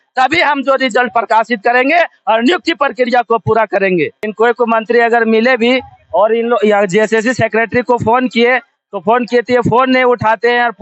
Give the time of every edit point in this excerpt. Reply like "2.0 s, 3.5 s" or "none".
4.2 s